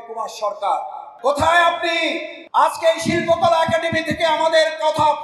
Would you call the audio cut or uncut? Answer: cut